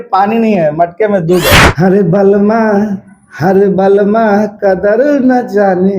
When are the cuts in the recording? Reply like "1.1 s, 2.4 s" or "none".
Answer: 1.6 s